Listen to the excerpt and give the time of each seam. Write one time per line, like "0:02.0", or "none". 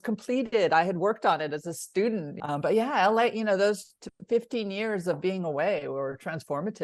0:02.4